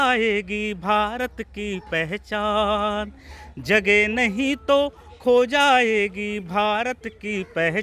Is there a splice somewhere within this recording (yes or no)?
no